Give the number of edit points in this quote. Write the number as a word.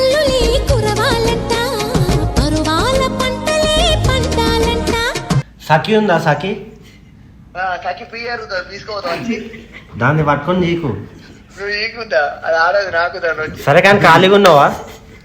one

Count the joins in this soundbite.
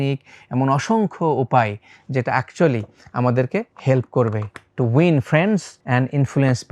two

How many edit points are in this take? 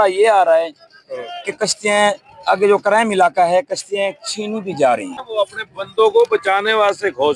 one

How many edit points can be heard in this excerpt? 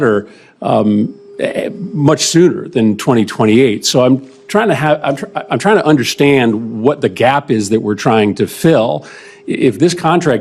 zero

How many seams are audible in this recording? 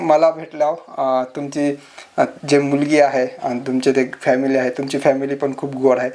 zero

